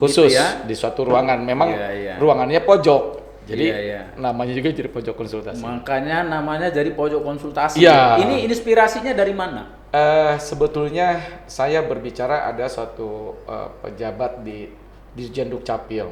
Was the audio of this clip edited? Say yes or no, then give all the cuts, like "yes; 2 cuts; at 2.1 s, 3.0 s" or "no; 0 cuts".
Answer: no; 0 cuts